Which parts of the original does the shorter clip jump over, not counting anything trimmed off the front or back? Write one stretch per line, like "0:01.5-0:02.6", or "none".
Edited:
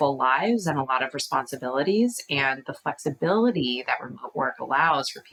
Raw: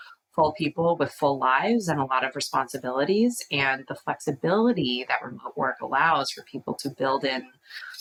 none